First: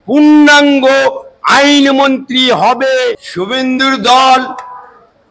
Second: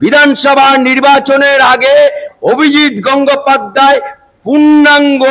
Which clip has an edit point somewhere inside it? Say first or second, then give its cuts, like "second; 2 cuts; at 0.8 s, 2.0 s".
first; 1 cut; at 3.2 s